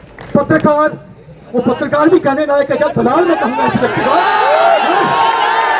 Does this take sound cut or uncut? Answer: uncut